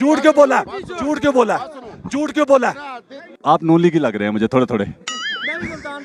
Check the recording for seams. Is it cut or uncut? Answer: cut